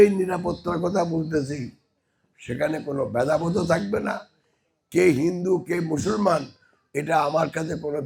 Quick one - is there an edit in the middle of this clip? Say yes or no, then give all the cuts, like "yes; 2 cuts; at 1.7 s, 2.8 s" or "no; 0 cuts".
no; 0 cuts